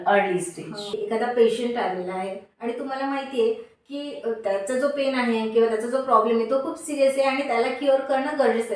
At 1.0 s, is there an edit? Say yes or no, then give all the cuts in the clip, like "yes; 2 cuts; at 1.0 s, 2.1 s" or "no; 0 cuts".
yes; 1 cut; at 1.0 s